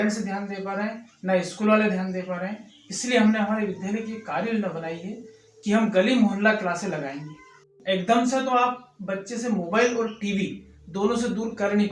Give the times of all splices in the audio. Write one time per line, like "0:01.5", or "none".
0:07.7